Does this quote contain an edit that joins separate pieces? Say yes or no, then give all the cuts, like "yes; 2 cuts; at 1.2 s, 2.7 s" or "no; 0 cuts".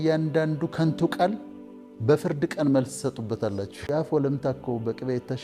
yes; 1 cut; at 3.8 s